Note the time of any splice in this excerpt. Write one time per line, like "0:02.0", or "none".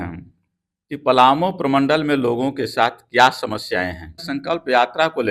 0:04.3